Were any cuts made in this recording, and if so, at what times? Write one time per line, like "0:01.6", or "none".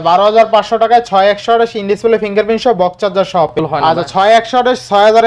0:03.5

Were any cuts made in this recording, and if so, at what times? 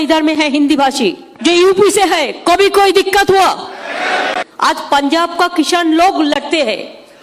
0:01.3
0:04.5

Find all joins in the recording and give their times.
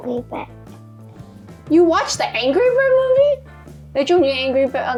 none

